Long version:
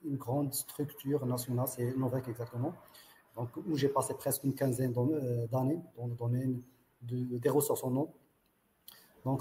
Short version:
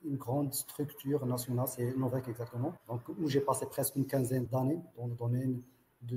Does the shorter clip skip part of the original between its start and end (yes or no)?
yes